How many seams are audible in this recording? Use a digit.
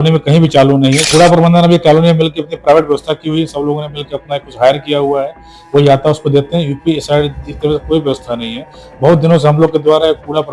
1